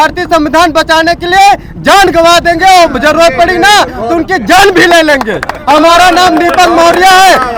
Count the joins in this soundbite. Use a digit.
0